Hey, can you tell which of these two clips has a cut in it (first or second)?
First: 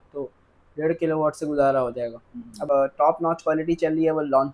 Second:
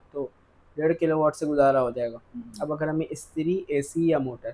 first